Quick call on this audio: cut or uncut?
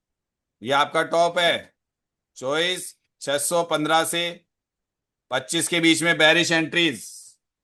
uncut